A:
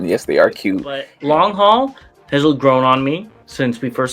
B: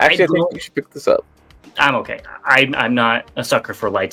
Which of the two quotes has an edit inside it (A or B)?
A